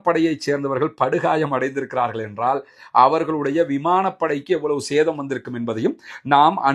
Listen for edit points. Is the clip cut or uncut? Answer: uncut